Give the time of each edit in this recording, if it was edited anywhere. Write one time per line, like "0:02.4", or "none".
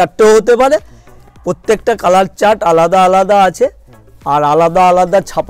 none